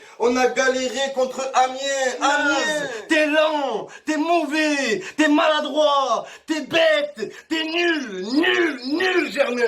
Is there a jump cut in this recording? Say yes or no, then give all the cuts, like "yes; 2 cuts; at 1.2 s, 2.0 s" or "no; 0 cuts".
yes; 1 cut; at 1.1 s